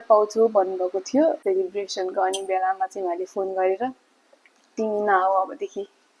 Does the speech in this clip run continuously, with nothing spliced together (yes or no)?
no